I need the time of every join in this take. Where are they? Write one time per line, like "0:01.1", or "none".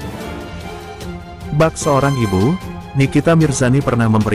0:01.3